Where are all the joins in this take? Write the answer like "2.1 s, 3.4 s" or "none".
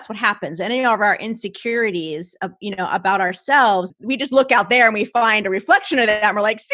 3.9 s